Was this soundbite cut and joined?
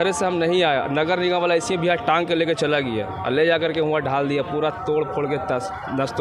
no; 0 cuts

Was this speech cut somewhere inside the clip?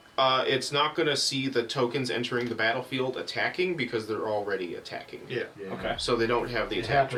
no; 0 cuts

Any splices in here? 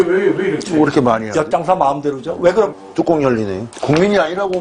yes; 1 cut; at 2.7 s

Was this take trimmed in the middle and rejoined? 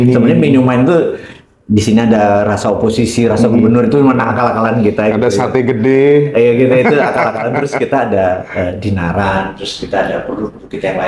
no; 0 cuts

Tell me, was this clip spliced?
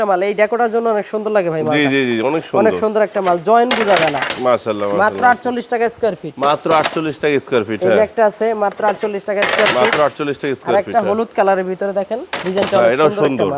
no; 0 cuts

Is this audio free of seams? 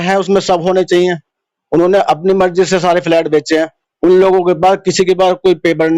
no; 1 cut; at 3.8 s

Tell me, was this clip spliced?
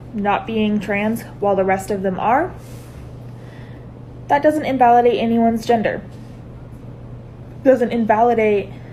no; 0 cuts

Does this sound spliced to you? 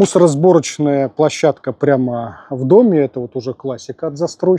no; 0 cuts

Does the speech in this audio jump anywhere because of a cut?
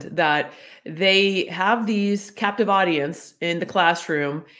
no; 0 cuts

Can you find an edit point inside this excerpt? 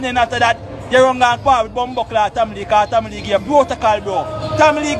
no; 0 cuts

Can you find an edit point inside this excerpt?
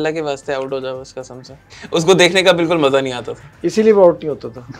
no; 0 cuts

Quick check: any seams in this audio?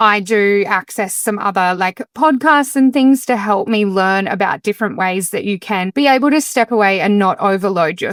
no; 0 cuts

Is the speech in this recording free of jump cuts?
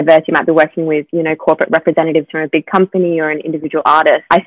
yes; 0 cuts

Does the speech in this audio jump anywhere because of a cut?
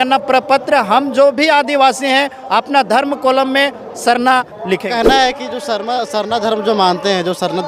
yes; 1 cut; at 4.9 s

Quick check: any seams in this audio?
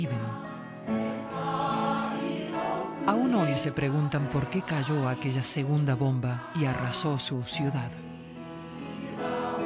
no; 0 cuts

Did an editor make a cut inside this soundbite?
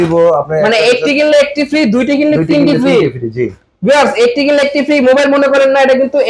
no; 0 cuts

